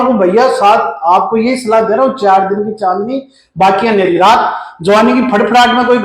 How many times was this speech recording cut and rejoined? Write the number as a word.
zero